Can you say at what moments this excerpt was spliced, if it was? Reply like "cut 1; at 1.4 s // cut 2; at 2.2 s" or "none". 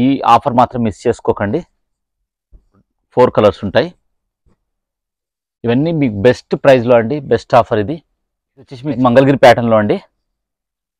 cut 1; at 3.0 s // cut 2; at 8.8 s